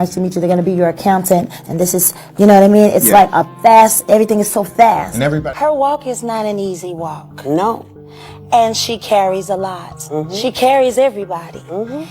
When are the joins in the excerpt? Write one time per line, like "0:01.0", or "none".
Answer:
0:05.5